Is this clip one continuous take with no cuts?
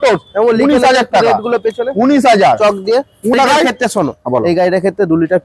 no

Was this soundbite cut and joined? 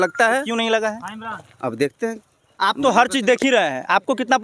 no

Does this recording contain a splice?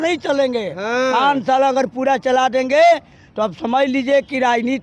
no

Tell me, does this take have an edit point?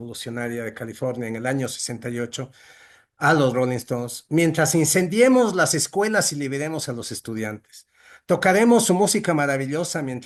no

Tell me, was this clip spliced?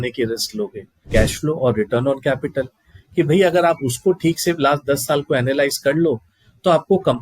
yes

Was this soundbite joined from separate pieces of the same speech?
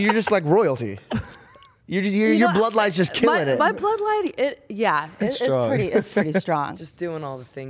yes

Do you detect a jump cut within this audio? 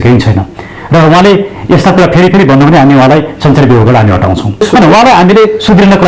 yes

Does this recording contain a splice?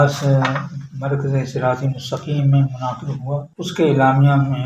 no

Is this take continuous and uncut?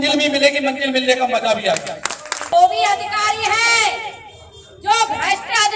no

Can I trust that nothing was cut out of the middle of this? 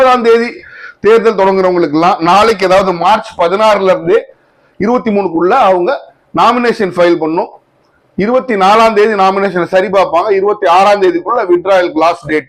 yes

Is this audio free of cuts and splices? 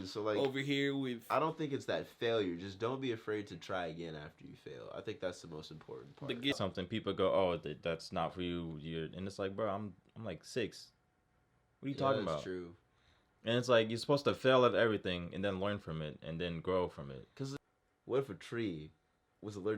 no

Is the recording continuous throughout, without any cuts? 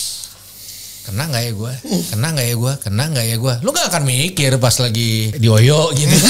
no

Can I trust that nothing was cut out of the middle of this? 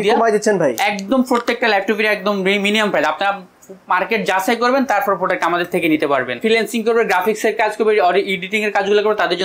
no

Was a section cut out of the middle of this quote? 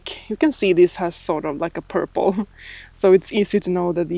no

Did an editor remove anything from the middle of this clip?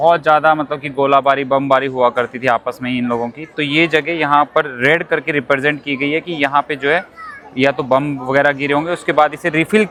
no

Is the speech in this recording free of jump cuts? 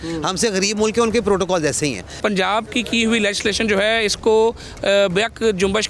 no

